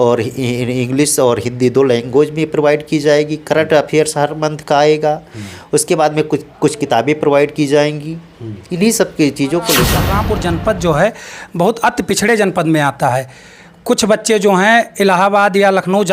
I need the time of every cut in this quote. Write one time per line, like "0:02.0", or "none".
0:10.2